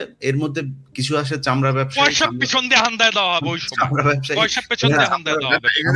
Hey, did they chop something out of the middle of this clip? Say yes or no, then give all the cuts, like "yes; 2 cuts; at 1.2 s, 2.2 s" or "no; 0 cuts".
no; 0 cuts